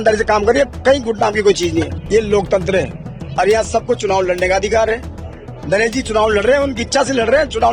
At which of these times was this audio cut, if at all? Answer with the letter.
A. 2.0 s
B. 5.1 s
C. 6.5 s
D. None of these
A